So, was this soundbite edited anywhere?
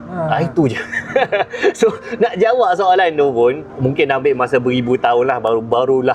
yes; 1 cut; at 3.7 s

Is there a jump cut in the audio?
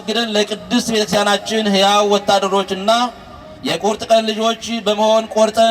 no; 0 cuts

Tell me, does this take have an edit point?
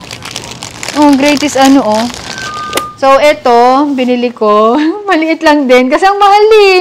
yes; 1 cut; at 2.8 s

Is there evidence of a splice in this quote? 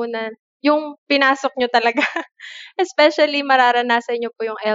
yes; 1 cut; at 1.0 s

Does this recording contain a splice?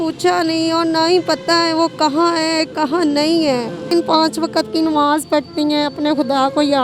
yes; 1 cut; at 3.9 s

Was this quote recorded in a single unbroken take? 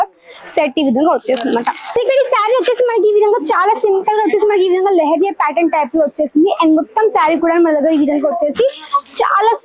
no; 1 cut; at 1.8 s

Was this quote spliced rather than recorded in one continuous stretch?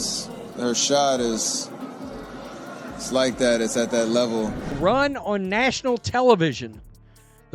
yes; 1 cut; at 4.6 s

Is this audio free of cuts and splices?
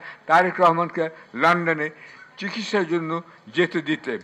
yes; 0 cuts

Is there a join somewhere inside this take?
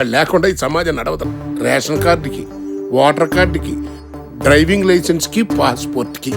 yes; 1 cut; at 1.3 s

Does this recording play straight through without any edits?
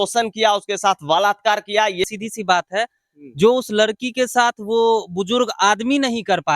no; 1 cut; at 1.9 s

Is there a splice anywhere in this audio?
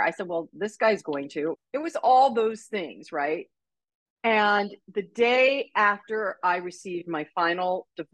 yes; 1 cut; at 1.5 s

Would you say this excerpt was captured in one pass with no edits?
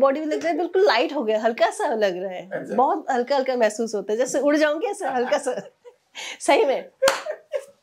yes; 0 cuts

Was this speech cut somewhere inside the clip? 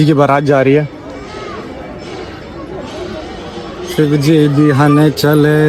no; 0 cuts

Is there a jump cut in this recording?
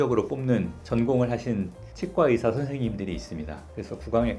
no; 0 cuts

